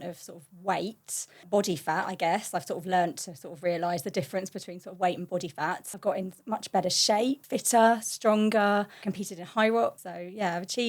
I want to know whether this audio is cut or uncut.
cut